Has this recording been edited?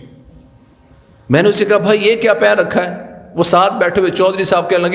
no; 0 cuts

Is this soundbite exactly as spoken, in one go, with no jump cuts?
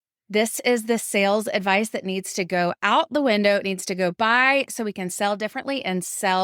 yes; 0 cuts

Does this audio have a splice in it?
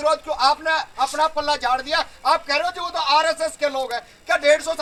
no; 0 cuts

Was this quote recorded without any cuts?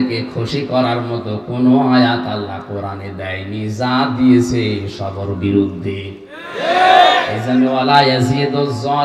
yes; 0 cuts

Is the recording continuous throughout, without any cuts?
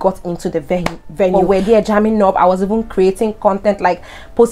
no; 1 cut; at 1.3 s

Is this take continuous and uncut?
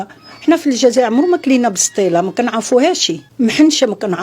no; 1 cut; at 3.2 s

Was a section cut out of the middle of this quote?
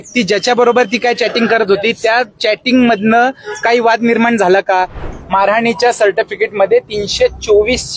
yes; 1 cut; at 5.0 s

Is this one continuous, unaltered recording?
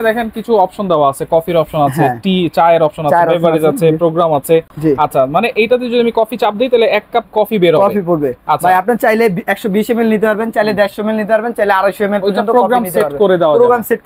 yes; 0 cuts

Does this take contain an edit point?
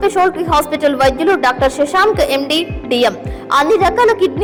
no; 0 cuts

